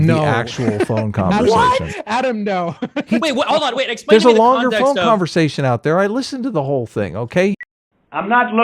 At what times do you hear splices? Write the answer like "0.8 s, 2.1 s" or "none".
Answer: 7.5 s